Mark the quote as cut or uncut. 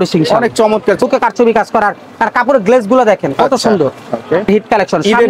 cut